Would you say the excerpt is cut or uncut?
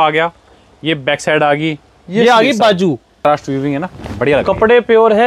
cut